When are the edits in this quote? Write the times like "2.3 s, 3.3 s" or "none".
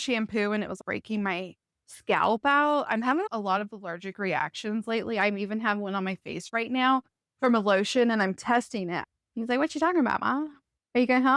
9.1 s